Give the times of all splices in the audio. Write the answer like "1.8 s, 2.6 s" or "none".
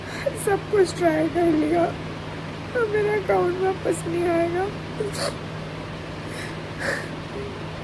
none